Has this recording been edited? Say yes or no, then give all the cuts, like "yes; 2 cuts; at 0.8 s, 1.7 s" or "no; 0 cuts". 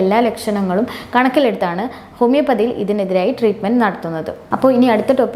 no; 0 cuts